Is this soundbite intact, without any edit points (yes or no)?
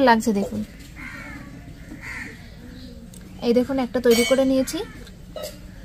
yes